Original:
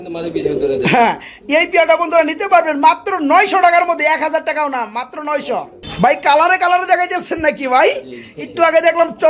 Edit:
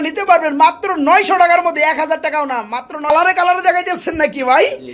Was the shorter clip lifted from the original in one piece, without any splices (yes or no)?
no